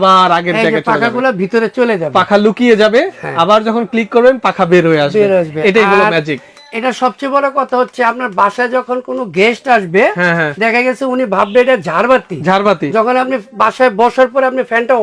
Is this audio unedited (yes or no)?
yes